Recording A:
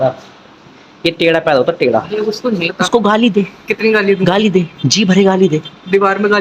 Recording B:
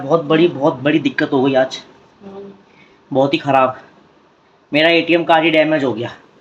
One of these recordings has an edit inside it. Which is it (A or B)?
A